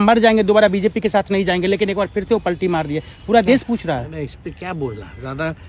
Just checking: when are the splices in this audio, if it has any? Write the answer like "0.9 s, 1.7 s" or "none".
none